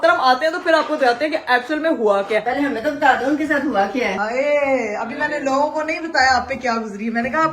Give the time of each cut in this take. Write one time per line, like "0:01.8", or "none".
0:02.4
0:04.2